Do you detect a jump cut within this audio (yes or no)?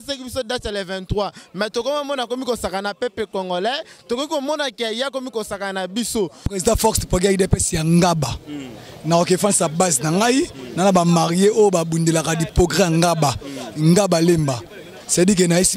yes